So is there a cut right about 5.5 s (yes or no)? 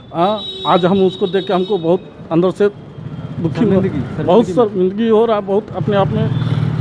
no